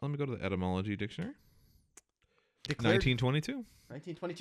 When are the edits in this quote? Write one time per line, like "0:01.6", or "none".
0:02.7